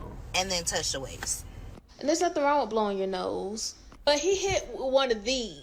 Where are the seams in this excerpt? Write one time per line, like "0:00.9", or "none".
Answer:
0:02.1

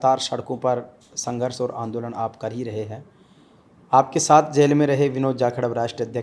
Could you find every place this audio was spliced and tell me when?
none

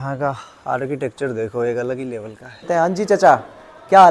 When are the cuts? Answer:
0:02.6

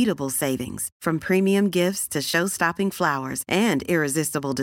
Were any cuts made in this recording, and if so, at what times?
none

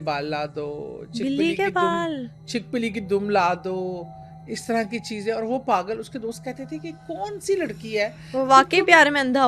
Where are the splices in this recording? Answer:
none

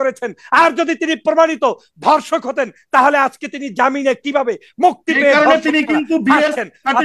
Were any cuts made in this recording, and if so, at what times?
none

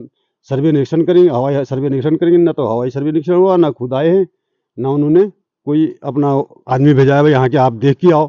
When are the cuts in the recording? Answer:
none

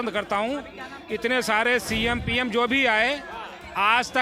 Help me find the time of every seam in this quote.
none

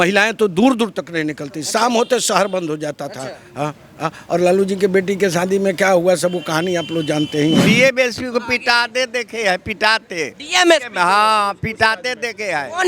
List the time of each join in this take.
0:07.6

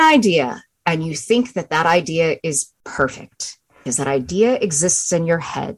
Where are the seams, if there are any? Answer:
0:03.8

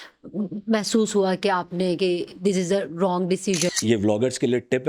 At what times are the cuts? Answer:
0:03.7

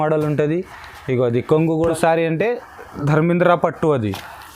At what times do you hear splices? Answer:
0:01.8

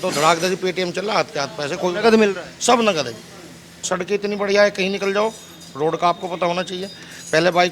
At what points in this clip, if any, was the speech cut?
0:03.8

